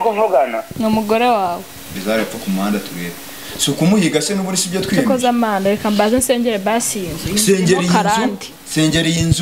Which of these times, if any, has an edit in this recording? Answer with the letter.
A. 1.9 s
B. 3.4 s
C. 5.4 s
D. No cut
A